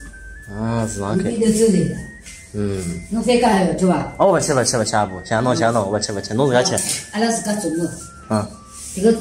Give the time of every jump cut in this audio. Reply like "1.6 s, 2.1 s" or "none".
none